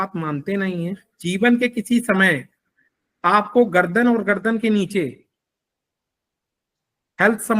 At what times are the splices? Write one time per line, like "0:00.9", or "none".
0:01.1